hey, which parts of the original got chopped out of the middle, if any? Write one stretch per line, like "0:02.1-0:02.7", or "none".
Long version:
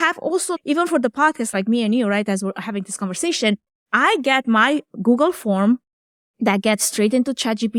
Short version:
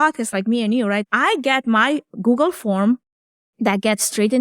0:02.3-0:03.9